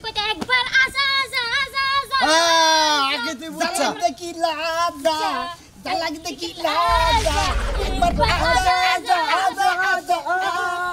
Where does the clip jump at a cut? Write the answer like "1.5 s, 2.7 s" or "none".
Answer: none